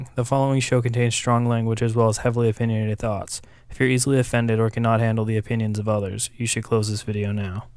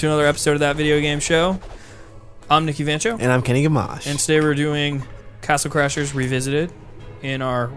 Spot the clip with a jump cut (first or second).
second